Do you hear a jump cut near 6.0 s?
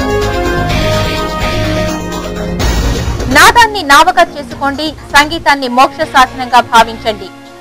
no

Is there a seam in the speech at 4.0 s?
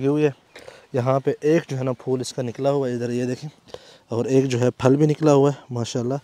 no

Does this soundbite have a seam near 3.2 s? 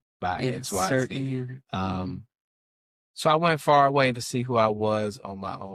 no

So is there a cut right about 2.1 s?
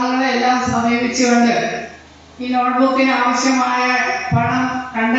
no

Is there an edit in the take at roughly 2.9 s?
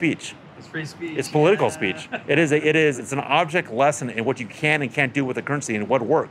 yes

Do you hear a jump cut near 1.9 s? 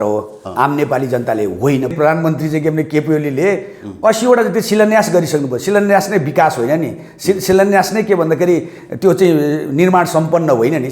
yes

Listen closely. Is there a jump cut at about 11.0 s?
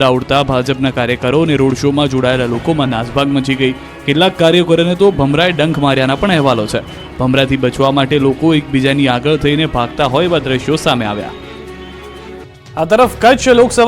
no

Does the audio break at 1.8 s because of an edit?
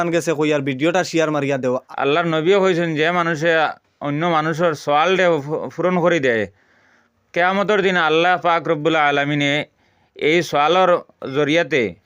yes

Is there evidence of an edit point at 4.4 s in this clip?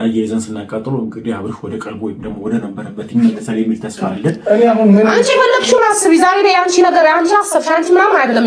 yes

